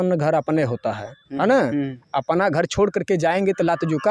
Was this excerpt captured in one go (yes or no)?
yes